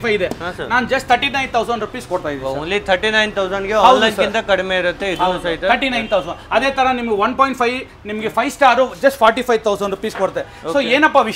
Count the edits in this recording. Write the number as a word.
zero